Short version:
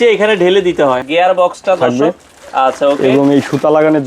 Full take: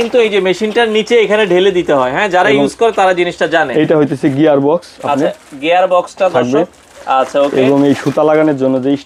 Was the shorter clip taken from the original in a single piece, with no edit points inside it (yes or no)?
no